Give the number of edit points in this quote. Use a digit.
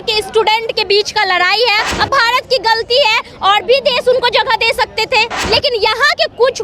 2